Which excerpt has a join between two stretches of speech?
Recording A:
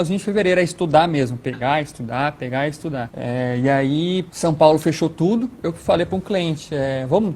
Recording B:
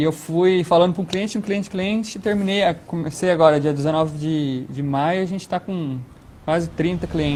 A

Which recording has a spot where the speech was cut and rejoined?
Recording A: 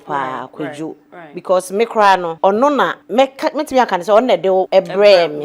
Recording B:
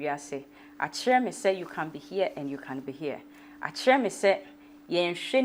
A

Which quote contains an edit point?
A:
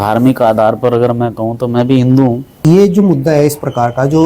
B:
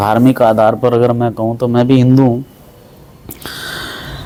A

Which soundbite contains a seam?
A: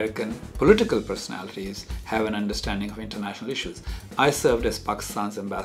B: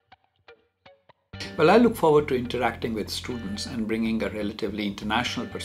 B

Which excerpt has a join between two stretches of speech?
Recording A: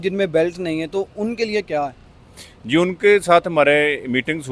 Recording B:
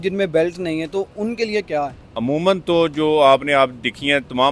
B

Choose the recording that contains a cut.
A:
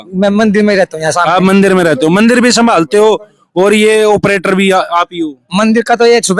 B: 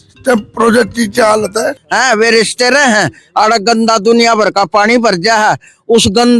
B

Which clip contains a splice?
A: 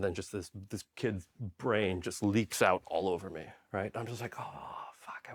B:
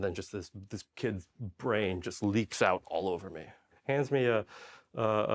B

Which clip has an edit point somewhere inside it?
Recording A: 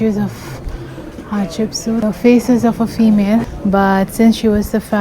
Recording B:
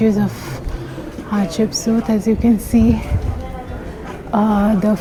A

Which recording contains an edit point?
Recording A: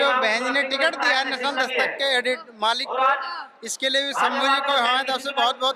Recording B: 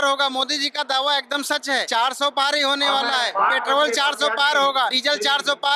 B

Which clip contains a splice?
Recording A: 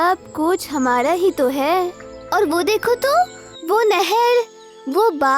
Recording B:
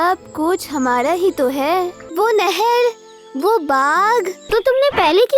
B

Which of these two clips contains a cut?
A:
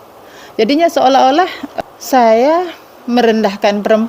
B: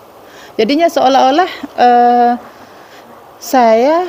A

